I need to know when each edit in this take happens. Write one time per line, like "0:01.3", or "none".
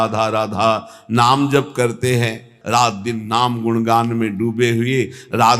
0:02.5